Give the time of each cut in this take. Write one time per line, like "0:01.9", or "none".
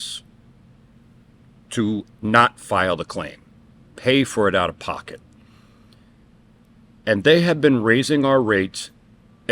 0:02.1